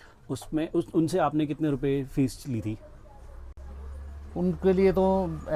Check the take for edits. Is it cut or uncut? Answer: uncut